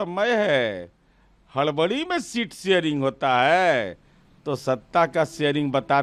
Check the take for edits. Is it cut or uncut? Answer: uncut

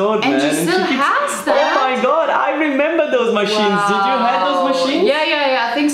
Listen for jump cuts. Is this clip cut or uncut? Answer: uncut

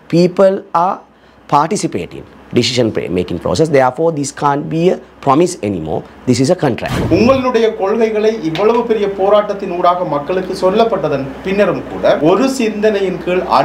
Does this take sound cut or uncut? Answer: cut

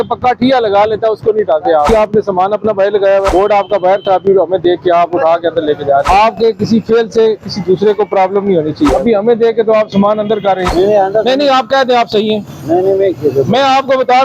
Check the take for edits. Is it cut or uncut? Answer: cut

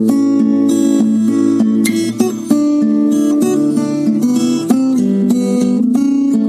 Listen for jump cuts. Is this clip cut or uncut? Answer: uncut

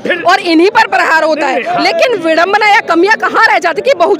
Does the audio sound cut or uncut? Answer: uncut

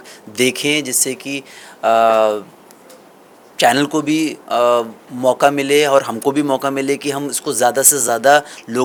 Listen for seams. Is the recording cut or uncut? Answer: uncut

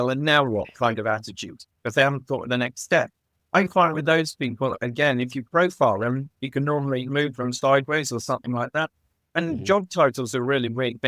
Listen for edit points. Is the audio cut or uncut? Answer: cut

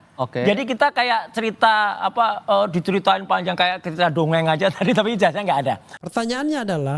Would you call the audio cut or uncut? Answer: cut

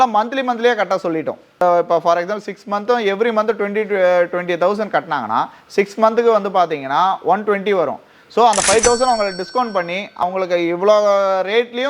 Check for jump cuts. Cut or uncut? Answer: cut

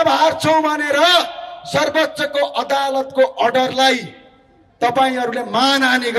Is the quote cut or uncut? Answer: uncut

